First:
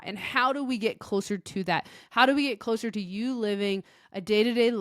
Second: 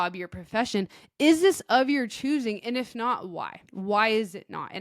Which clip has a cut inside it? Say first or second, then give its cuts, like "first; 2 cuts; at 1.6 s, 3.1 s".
second; 1 cut; at 3.6 s